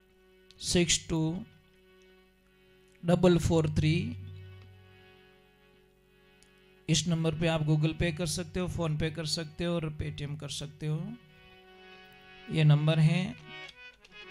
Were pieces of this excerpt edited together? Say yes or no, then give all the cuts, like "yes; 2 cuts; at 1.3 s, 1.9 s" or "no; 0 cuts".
no; 0 cuts